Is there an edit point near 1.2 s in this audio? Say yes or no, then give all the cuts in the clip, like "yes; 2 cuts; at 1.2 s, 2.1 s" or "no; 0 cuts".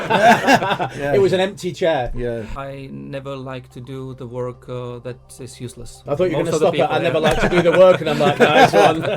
no; 2 cuts; at 2.5 s, 6.0 s